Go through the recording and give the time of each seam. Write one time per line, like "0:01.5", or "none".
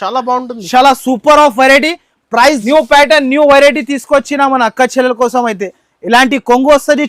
0:02.6